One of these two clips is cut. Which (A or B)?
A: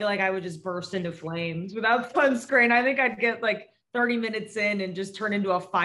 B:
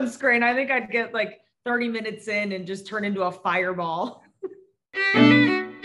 B